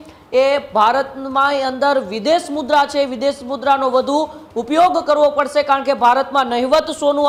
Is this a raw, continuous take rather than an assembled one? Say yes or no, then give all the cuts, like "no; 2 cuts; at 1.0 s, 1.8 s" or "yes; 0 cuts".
yes; 0 cuts